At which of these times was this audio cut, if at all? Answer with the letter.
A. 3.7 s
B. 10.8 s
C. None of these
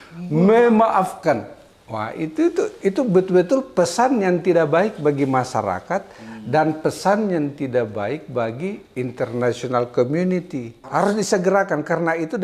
B